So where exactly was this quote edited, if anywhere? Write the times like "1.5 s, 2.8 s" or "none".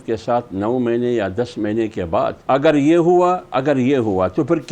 2.4 s